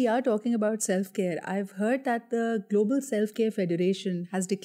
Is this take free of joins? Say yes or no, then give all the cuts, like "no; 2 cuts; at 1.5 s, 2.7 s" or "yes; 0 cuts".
yes; 0 cuts